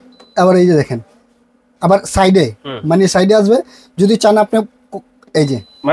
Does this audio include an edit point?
no; 0 cuts

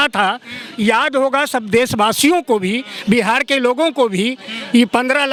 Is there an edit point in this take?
no; 0 cuts

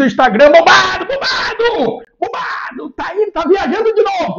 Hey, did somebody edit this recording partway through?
no; 0 cuts

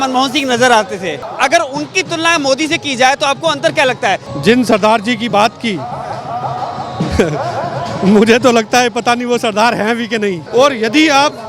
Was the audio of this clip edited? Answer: yes; 3 cuts; at 1.2 s, 4.3 s, 10.4 s

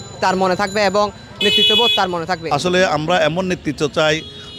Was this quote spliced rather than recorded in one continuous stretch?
yes; 1 cut; at 2.4 s

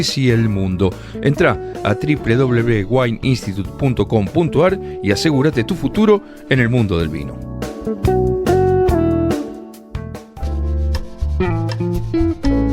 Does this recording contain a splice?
yes; 1 cut; at 10.2 s

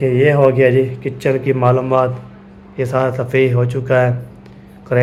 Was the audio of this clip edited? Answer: no; 0 cuts

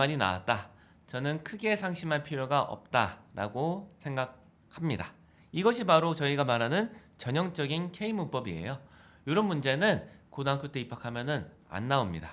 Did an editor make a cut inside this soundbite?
no; 0 cuts

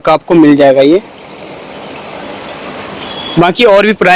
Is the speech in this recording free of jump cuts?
yes; 0 cuts

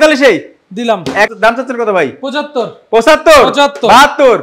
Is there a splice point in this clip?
yes; 1 cut; at 1.3 s

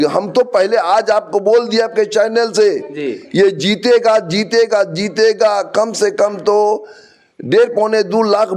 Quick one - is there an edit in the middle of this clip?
no; 0 cuts

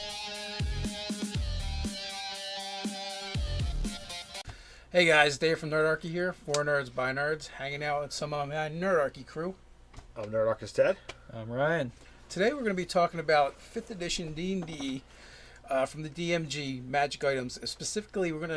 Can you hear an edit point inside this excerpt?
no; 0 cuts

